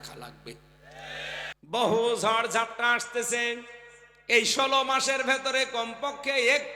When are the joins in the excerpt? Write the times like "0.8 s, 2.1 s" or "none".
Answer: 1.6 s